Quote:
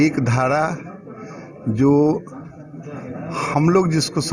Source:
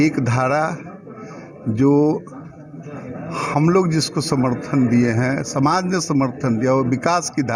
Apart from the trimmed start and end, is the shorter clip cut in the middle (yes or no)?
no